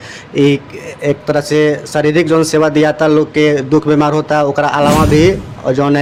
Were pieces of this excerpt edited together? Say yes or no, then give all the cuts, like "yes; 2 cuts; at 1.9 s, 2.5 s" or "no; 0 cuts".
no; 0 cuts